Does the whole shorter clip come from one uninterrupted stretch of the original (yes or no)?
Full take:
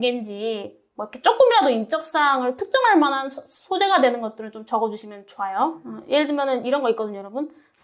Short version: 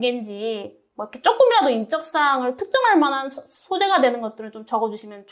yes